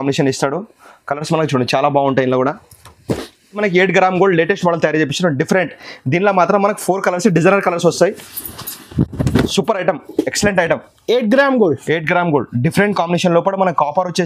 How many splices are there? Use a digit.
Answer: 1